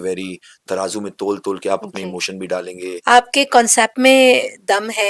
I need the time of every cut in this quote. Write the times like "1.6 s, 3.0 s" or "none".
2.9 s